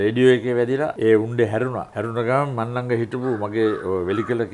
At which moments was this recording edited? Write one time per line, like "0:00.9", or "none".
0:00.9
0:01.9

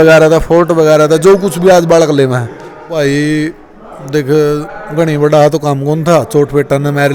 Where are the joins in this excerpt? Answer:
0:02.7

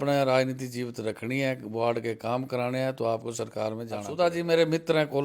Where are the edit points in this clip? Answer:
0:04.1

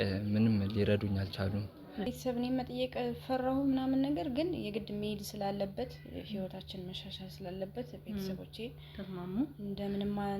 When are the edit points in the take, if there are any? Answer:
0:02.0

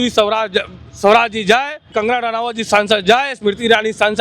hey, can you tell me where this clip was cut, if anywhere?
0:01.9

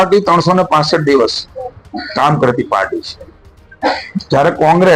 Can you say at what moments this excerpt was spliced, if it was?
none

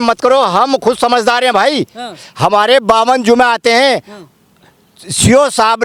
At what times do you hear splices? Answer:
none

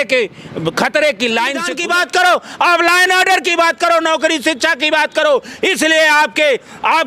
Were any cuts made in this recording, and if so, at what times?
0:01.7

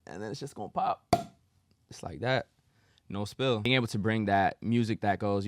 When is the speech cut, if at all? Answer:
0:03.7

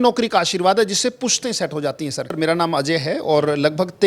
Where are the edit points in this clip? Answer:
0:02.3

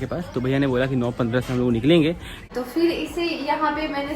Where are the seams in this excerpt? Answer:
0:02.5

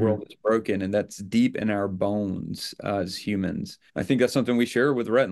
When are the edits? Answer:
0:03.8

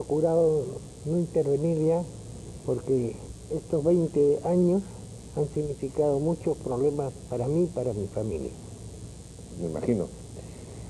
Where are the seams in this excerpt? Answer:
0:09.7

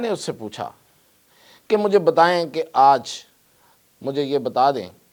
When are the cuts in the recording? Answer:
none

